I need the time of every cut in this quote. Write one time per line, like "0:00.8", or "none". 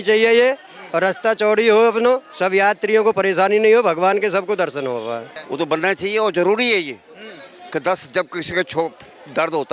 0:05.4

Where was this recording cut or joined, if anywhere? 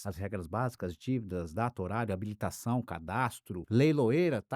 0:03.5

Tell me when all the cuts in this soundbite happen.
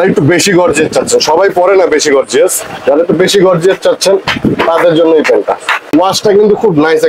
0:05.8

